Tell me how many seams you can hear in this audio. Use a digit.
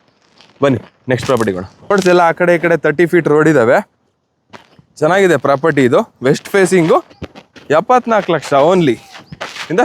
1